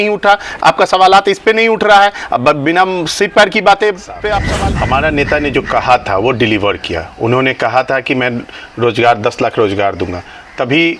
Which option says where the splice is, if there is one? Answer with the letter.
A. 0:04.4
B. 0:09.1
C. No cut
A